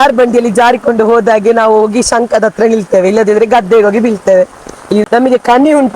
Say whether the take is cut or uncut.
cut